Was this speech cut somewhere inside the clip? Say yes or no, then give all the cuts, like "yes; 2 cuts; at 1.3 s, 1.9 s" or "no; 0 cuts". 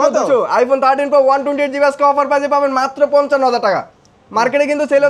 no; 0 cuts